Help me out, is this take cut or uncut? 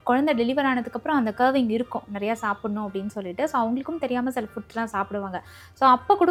uncut